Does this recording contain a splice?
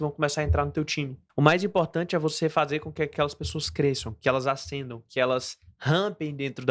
yes; 1 cut; at 1.2 s

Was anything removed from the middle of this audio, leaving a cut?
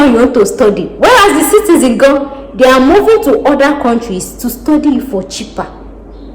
no; 0 cuts

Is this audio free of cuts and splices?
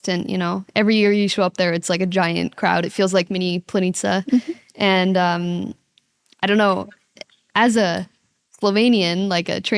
yes; 0 cuts

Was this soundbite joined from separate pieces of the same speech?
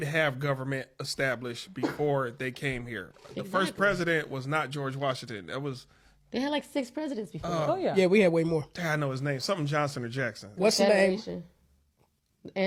no; 0 cuts

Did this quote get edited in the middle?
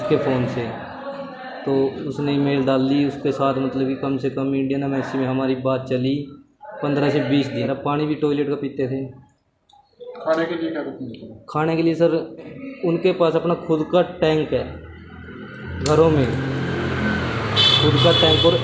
yes; 2 cuts; at 7.7 s, 12.5 s

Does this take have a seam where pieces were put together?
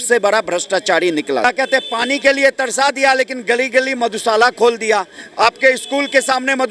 yes; 1 cut; at 1.4 s

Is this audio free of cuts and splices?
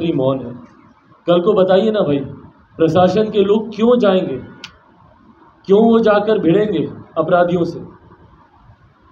yes; 0 cuts

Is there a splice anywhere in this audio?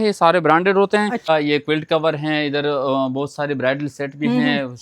yes; 1 cut; at 1.3 s

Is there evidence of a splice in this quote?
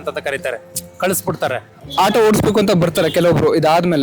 yes; 1 cut; at 1.8 s

